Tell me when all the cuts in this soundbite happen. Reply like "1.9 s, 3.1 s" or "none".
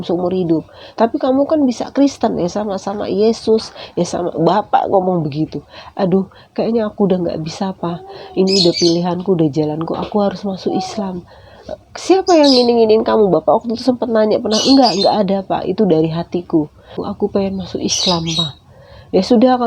17.0 s